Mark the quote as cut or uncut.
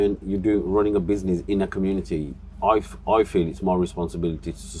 uncut